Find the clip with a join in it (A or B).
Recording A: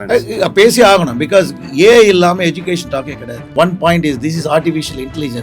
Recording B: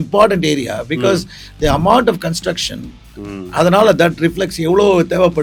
A